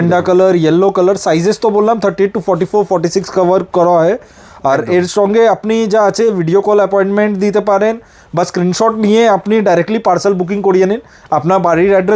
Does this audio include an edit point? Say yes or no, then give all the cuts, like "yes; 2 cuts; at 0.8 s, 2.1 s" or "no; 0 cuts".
no; 0 cuts